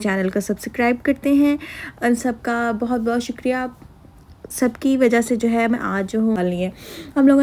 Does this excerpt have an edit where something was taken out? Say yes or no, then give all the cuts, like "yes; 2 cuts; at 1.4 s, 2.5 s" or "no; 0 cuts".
yes; 1 cut; at 6.4 s